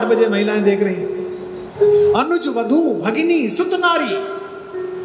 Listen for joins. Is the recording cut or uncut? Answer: cut